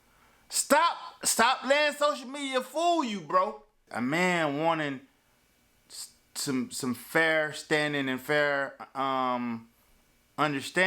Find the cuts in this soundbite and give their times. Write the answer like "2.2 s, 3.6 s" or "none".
3.8 s